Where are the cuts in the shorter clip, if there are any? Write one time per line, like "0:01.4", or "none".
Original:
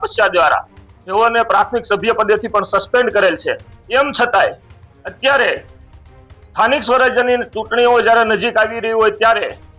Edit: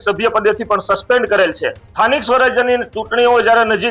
0:01.8